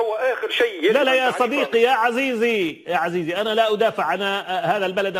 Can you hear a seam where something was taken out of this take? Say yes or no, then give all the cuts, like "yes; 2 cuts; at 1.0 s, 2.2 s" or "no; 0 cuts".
no; 0 cuts